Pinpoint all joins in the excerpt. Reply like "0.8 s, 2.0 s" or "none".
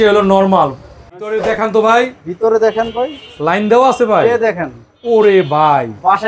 1.2 s

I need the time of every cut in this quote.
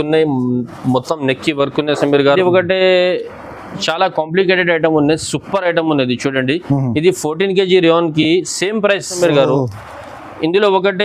2.4 s, 9.2 s

